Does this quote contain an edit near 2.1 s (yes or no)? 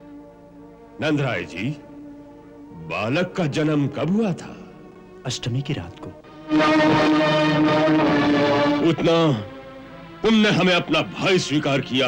no